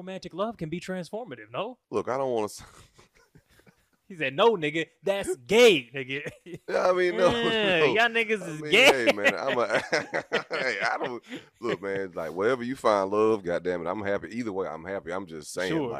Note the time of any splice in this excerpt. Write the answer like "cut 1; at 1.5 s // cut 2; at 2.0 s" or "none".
cut 1; at 1.8 s